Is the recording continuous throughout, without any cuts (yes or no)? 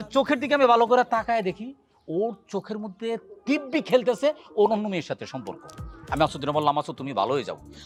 yes